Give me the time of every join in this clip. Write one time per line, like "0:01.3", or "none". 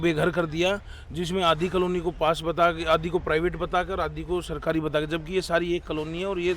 none